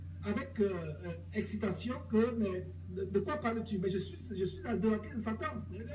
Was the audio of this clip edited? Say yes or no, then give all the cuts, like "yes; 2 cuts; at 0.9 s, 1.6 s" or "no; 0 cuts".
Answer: no; 0 cuts